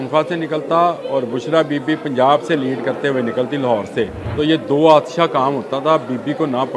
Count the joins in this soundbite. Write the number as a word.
one